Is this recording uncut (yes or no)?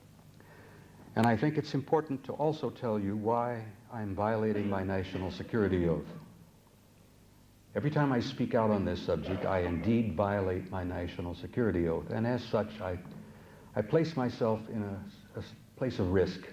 no